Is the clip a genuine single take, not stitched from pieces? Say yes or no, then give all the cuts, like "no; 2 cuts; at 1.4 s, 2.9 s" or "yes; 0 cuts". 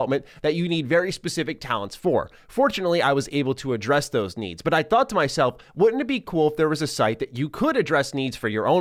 yes; 0 cuts